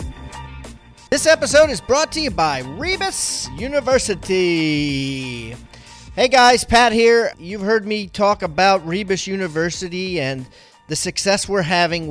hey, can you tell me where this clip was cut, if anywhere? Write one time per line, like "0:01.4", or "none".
none